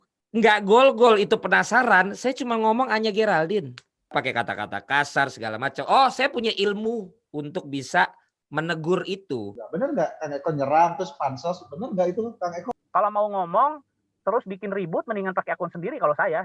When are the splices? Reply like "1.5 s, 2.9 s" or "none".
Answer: 4.1 s, 9.6 s, 12.6 s